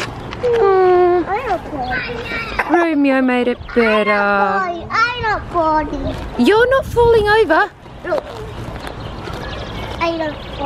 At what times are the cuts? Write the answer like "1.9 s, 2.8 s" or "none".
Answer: none